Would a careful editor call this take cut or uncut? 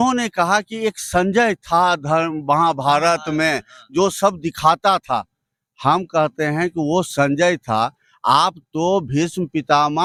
uncut